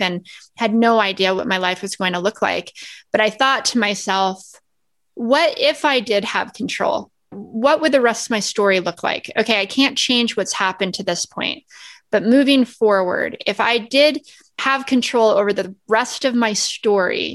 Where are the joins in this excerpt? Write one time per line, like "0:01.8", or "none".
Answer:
0:07.4
0:14.6